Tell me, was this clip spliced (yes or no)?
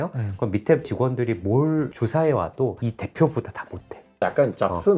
yes